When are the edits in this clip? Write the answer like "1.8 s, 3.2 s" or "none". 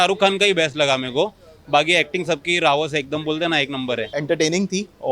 4.0 s